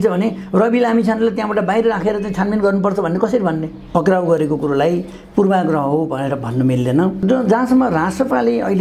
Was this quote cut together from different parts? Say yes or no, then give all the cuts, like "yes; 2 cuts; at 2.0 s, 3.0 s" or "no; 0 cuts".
yes; 2 cuts; at 3.8 s, 7.2 s